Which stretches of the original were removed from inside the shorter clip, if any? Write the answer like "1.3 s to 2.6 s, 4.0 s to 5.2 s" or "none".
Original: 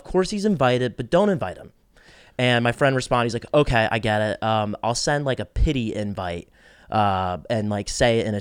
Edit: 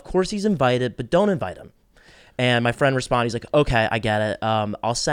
none